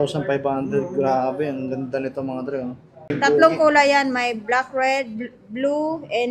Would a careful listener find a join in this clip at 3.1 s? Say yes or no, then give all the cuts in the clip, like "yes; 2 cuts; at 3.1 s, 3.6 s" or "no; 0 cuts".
yes; 1 cut; at 3.1 s